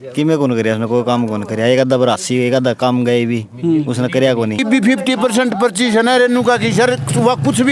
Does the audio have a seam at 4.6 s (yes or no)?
yes